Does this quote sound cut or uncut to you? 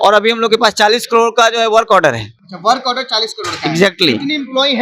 uncut